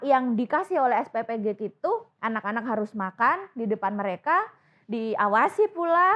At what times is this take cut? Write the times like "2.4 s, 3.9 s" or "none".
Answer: none